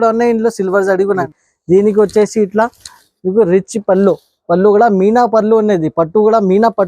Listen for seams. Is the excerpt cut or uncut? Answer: cut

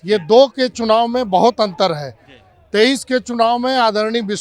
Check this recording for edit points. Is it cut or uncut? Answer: uncut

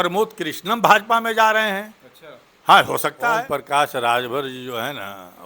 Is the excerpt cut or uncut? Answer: cut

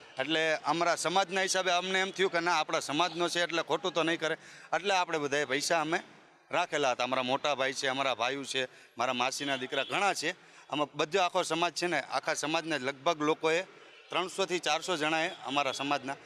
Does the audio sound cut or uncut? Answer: uncut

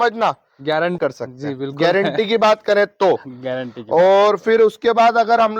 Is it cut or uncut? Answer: cut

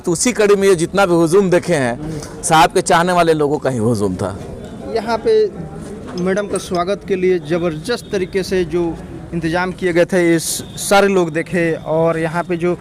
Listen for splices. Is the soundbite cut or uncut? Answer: uncut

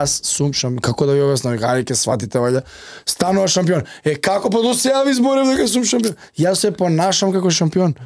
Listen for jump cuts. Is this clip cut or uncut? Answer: uncut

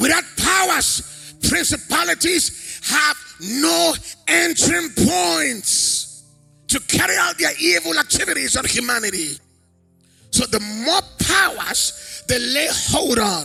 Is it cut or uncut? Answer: uncut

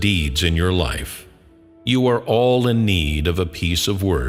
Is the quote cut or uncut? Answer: uncut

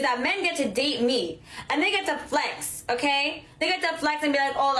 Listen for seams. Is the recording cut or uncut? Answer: cut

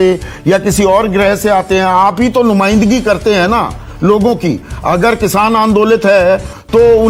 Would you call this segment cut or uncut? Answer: uncut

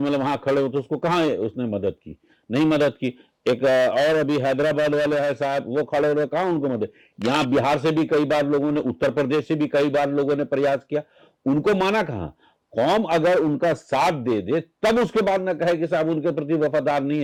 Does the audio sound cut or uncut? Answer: uncut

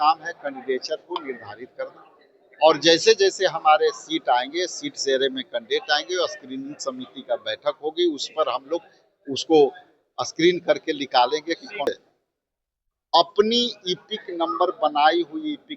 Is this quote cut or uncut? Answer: cut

